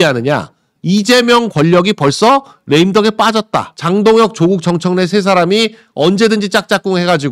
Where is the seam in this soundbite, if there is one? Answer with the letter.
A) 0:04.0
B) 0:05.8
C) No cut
A